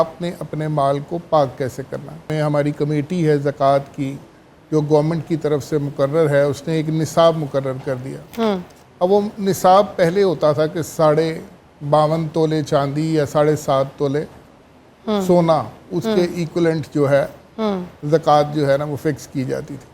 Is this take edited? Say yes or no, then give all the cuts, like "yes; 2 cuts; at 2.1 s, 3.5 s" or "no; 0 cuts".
yes; 1 cut; at 2.3 s